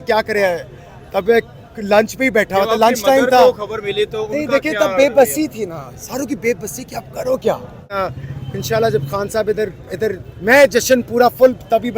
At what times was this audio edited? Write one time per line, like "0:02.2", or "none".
0:07.9